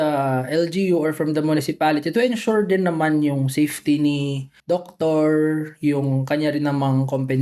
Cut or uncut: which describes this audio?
cut